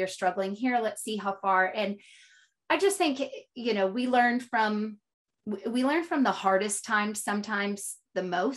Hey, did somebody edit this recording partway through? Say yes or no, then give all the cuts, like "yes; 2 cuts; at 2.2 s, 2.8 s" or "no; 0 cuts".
no; 0 cuts